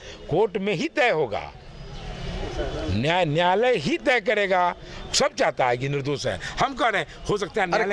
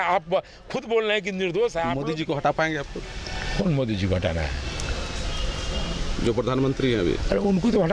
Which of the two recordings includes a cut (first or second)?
second